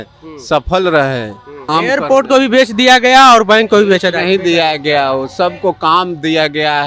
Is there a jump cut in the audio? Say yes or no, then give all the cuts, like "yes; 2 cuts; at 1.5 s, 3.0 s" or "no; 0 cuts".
yes; 1 cut; at 1.6 s